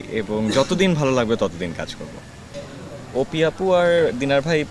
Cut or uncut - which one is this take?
cut